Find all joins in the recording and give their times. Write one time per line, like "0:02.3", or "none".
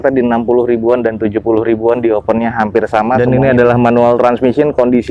0:03.2

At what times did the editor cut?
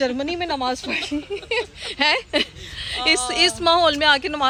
none

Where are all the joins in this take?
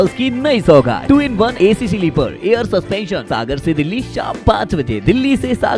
0:01.1
0:03.2

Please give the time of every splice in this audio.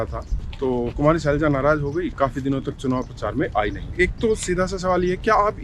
0:00.9
0:03.8

